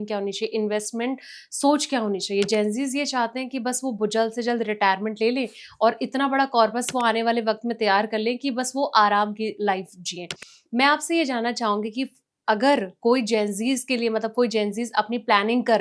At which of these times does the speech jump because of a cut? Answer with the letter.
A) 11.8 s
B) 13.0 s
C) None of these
C